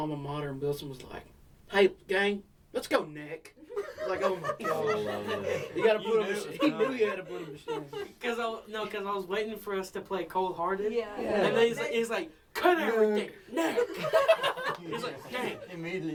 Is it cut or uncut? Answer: uncut